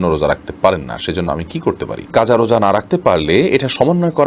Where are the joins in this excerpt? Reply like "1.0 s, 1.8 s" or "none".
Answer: 2.1 s

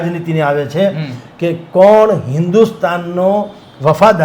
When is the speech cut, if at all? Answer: none

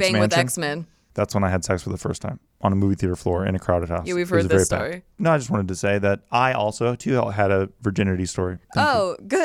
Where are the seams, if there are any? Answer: 1.0 s

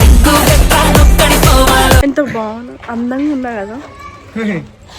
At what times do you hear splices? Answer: 2.0 s

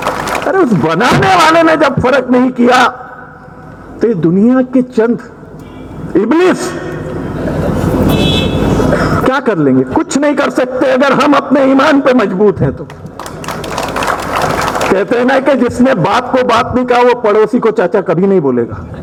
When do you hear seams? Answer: none

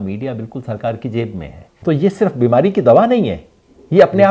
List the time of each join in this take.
1.8 s

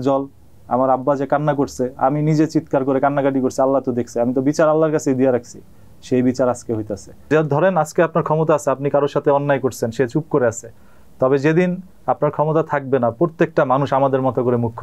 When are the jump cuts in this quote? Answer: 7.3 s

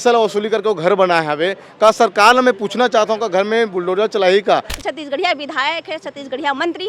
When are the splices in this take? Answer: 4.9 s

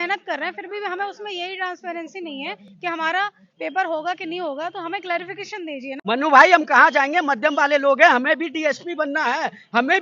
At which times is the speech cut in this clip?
5.9 s

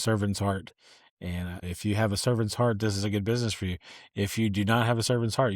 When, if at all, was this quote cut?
1.7 s

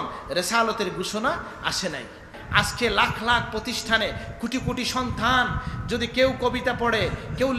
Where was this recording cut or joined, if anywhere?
2.4 s

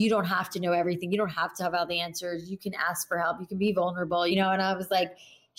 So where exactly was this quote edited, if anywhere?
4.3 s

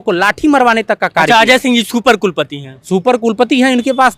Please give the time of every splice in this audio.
none

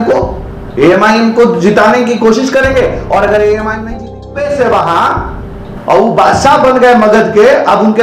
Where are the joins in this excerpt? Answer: 4.1 s

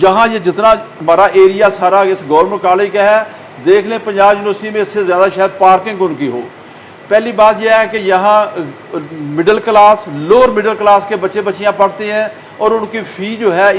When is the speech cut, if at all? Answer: none

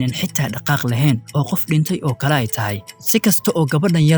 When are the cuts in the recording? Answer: none

